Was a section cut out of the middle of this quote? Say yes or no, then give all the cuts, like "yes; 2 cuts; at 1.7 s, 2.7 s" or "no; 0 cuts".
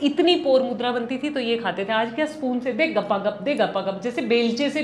no; 0 cuts